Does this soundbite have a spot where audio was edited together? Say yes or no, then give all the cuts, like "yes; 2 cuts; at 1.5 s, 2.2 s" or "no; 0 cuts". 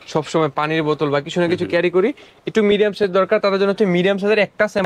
no; 0 cuts